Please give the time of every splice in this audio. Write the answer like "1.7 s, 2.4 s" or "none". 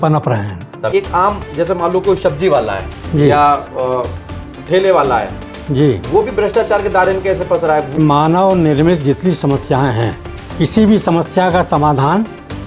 0.9 s, 8.0 s